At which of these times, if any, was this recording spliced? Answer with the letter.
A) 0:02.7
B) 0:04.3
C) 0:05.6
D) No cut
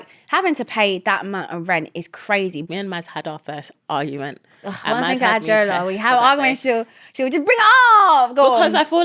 A